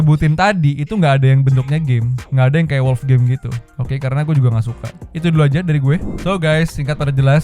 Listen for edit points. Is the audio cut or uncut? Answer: uncut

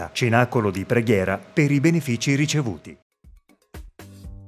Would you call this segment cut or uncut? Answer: cut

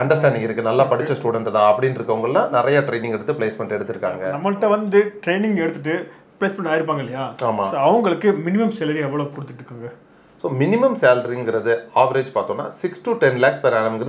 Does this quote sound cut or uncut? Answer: cut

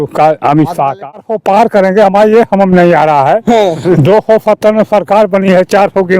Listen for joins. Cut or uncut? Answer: cut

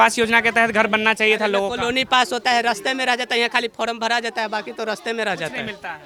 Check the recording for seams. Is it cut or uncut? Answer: uncut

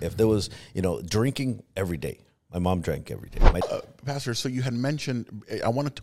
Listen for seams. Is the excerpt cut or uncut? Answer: cut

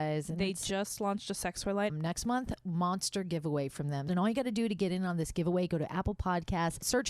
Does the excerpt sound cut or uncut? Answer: cut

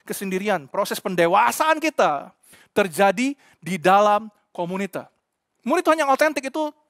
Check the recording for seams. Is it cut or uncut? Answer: cut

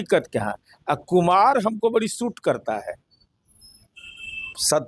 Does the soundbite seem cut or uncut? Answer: uncut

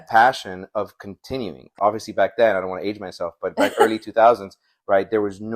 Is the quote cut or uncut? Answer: cut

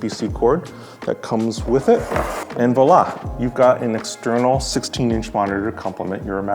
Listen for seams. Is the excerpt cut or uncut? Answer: cut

